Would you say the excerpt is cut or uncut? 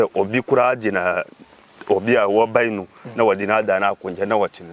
uncut